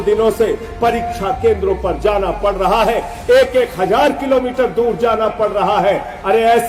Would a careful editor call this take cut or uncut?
uncut